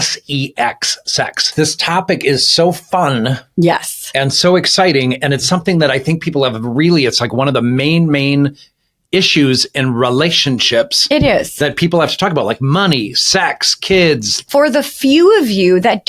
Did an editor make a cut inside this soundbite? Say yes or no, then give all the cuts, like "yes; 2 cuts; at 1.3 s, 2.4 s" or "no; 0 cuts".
yes; 2 cuts; at 1.5 s, 14.3 s